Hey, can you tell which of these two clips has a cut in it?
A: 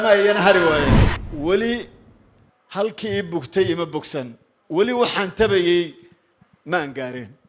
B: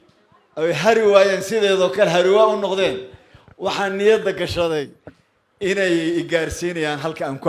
A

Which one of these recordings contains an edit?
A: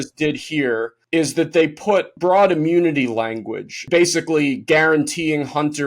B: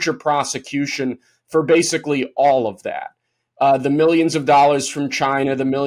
A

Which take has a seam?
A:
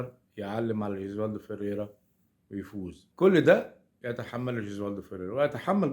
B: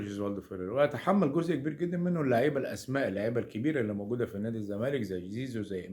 A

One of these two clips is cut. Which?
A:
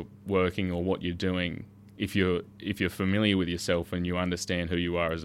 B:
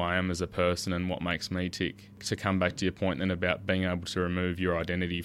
B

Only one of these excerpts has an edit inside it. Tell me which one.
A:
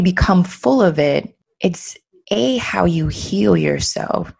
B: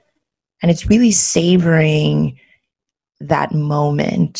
A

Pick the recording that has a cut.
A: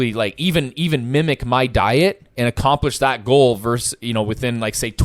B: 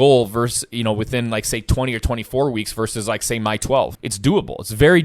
B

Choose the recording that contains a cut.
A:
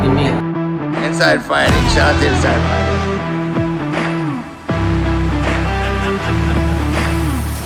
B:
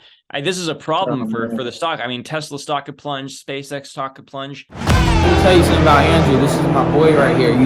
B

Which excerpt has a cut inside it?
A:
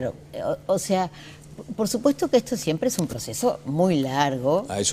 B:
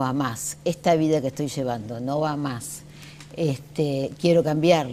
A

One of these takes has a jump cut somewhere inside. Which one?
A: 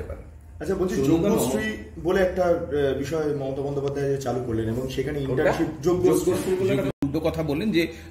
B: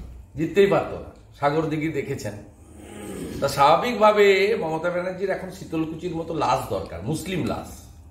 A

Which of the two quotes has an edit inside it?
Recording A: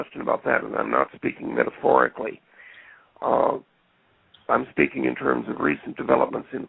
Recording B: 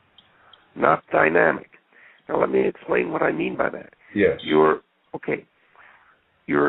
B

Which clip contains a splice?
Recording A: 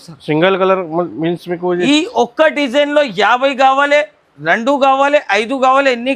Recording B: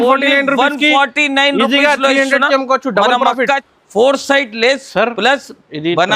B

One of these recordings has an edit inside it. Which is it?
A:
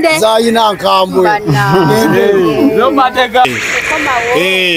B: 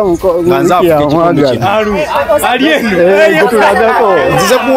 A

